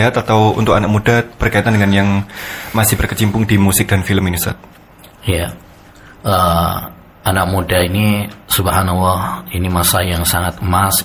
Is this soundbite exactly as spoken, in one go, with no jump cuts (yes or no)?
yes